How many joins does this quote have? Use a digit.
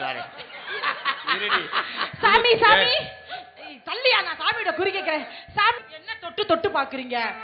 1